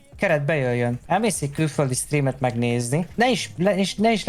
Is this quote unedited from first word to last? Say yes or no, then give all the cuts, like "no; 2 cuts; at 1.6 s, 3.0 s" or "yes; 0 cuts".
no; 2 cuts; at 1.0 s, 3.1 s